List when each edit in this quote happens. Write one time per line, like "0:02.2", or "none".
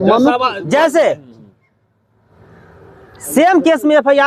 none